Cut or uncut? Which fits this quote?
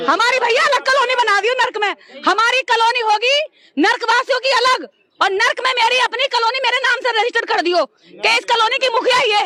uncut